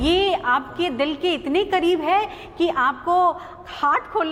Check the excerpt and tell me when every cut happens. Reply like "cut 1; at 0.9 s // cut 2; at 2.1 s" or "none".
none